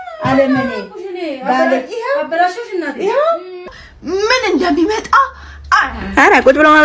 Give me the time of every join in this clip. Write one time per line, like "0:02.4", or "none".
0:03.7